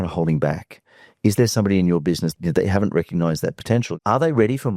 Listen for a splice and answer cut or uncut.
cut